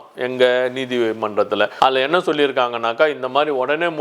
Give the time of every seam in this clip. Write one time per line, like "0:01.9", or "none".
none